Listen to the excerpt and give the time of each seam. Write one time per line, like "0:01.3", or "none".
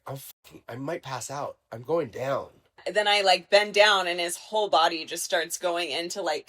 0:02.8